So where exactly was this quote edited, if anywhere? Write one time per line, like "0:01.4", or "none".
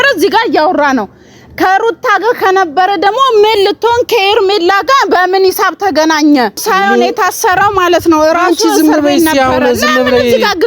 0:06.6